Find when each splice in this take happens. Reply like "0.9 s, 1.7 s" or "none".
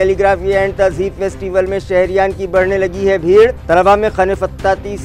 none